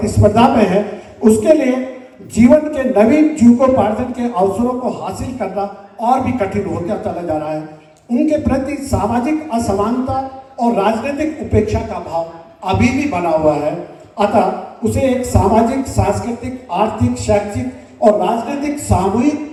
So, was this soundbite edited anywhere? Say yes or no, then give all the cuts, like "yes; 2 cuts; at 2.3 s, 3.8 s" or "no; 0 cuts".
no; 0 cuts